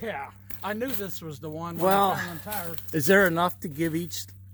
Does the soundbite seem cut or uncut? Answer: uncut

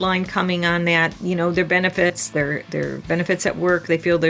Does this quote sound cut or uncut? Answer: cut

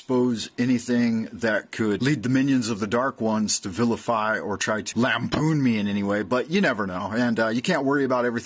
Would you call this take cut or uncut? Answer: cut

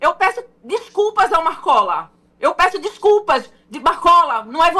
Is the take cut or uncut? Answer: uncut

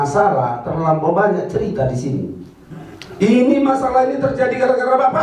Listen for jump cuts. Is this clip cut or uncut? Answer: uncut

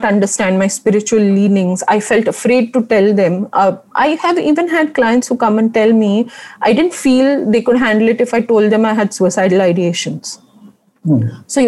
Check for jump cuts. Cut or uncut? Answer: uncut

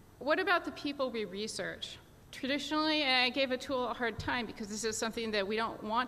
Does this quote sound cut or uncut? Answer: cut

